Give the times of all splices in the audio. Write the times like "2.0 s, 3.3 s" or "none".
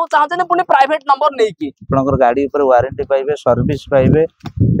1.9 s